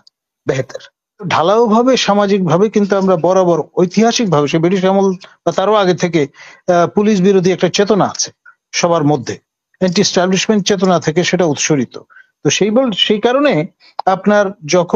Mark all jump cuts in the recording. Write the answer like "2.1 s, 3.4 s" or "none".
1.3 s